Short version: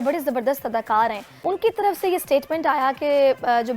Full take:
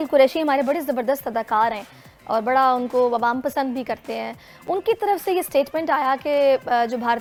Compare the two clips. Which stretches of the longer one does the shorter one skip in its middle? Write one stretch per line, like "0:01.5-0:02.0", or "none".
0:01.8-0:04.5